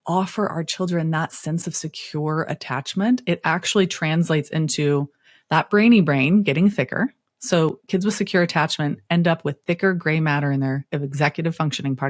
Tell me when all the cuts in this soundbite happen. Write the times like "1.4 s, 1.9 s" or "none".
none